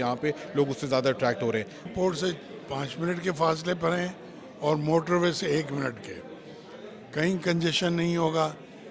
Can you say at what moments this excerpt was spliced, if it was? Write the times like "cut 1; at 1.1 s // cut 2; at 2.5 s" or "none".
cut 1; at 1.9 s